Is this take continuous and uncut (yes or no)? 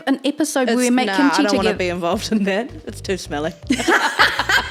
yes